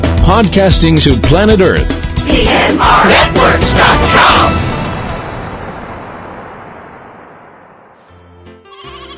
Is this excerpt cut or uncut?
cut